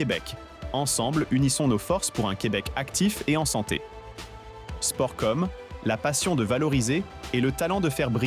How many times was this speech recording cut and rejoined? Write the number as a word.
zero